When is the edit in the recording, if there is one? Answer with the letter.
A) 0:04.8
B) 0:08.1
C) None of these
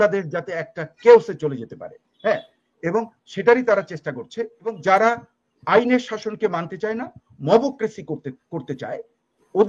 A